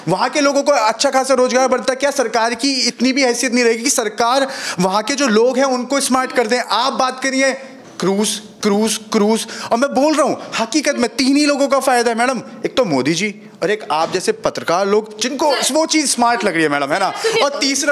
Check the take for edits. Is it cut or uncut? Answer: uncut